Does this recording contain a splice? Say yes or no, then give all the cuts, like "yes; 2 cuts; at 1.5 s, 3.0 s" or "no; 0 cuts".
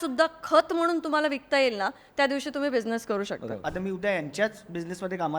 yes; 1 cut; at 3.7 s